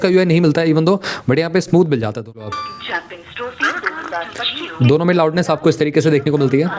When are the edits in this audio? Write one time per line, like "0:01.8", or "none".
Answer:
0:02.4